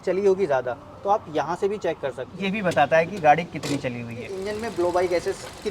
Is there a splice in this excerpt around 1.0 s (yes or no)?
no